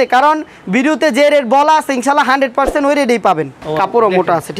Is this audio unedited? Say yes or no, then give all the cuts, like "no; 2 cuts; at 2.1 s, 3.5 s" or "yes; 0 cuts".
no; 1 cut; at 3.6 s